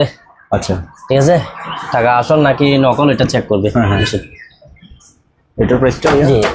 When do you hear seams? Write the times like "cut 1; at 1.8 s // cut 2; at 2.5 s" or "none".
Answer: none